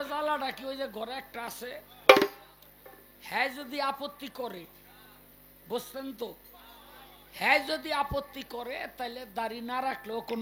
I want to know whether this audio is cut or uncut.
uncut